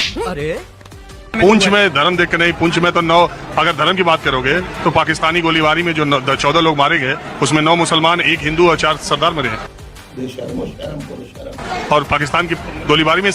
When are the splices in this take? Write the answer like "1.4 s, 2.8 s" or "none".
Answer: none